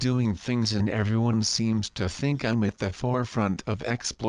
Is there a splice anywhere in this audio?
yes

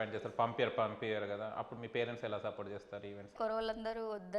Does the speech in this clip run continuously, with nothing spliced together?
no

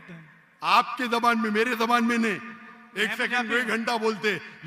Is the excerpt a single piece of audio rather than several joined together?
yes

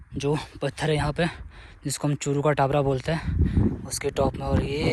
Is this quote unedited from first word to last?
yes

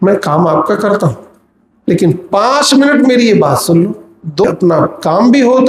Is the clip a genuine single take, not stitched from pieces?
no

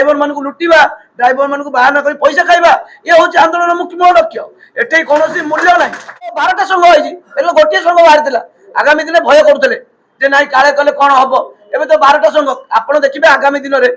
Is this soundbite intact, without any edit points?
no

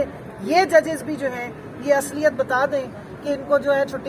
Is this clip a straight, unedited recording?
yes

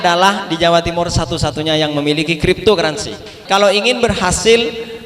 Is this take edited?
yes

